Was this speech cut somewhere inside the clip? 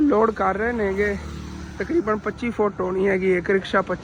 no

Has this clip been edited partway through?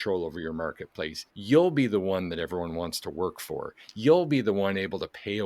yes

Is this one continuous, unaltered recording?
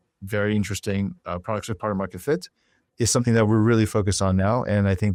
yes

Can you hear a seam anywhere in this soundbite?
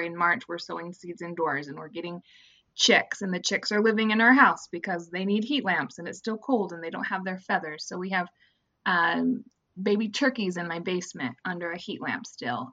no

